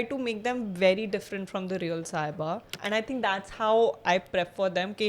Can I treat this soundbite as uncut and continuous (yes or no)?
no